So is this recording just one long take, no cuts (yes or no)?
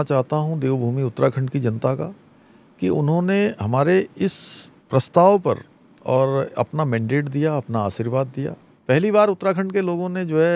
no